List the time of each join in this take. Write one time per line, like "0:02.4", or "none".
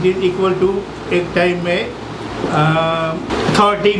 none